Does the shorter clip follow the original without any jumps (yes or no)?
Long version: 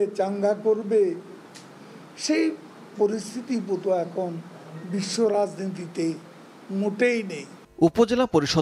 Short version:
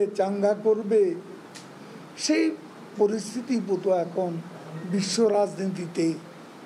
yes